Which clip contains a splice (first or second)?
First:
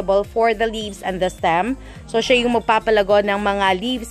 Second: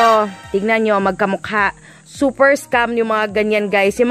second